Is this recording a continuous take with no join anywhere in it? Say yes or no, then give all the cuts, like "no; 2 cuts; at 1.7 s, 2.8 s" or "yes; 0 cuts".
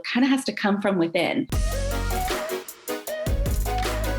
no; 1 cut; at 1.6 s